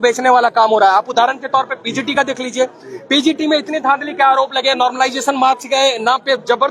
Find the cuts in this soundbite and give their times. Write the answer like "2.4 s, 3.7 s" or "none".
none